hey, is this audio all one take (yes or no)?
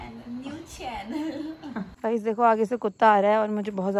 no